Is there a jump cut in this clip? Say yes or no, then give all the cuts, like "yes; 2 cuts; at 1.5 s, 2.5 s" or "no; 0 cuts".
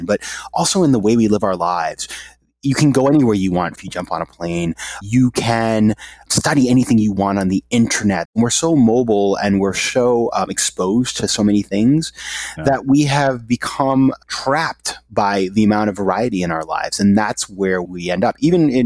yes; 6 cuts; at 3.8 s, 5.0 s, 6.2 s, 8.3 s, 14.2 s, 17.9 s